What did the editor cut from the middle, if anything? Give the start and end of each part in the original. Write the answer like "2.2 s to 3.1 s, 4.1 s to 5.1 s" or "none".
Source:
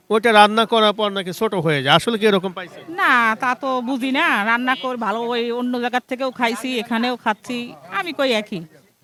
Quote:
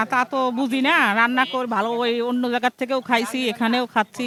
none